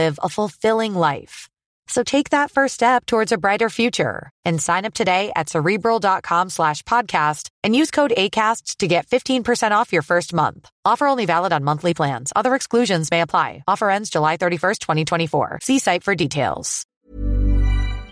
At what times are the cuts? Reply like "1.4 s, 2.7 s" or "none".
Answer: 16.8 s